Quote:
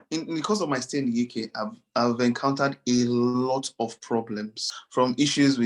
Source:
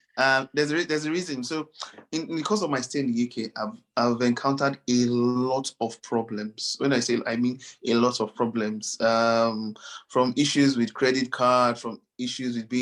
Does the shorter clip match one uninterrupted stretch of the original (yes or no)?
no